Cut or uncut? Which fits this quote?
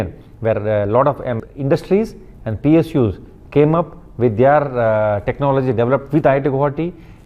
uncut